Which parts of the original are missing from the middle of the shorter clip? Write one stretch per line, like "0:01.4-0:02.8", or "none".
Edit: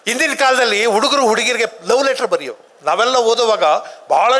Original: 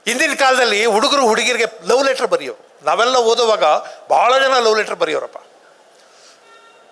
none